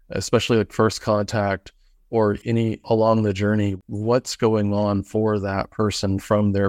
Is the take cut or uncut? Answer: cut